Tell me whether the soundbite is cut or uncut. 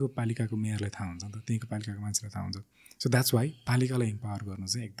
uncut